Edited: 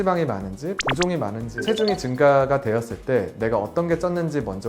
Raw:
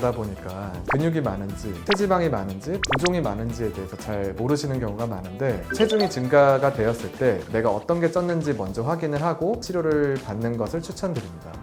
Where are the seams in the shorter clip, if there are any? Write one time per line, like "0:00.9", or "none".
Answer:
0:01.5